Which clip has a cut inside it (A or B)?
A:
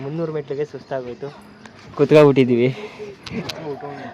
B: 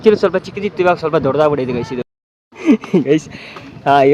B